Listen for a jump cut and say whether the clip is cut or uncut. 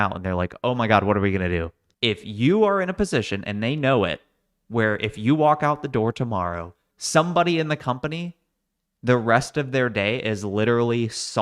cut